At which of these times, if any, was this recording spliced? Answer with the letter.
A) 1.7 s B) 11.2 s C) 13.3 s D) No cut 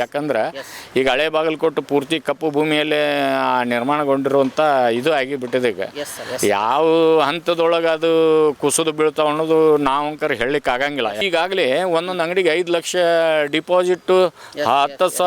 B